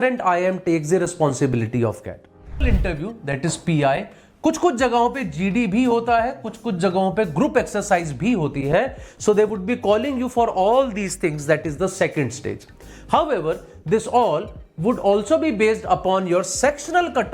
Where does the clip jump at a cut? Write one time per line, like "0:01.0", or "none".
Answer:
0:02.6

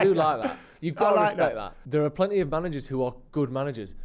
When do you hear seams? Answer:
0:01.7

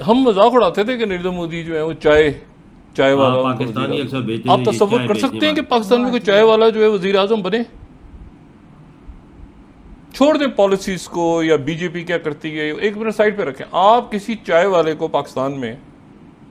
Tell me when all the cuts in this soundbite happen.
none

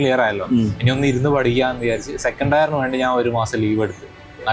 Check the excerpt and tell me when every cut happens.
none

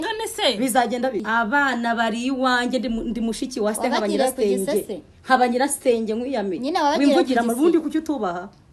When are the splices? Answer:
0:01.2

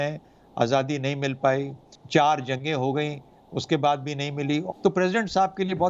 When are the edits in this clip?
0:04.7

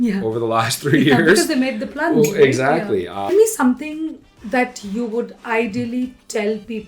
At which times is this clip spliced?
0:03.3

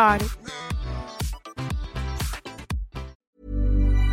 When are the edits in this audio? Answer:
0:03.1

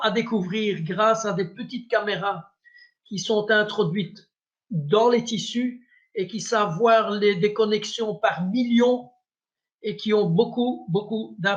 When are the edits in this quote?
none

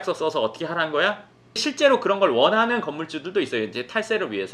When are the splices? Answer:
0:01.6

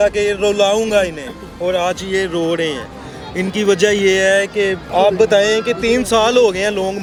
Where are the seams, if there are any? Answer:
none

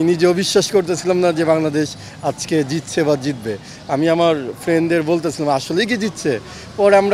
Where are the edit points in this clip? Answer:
none

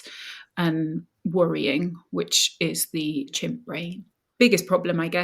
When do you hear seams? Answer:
0:03.3

